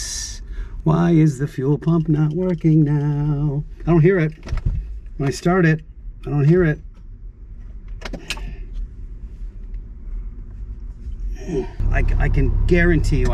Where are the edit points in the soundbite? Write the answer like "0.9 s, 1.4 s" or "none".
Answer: 12.2 s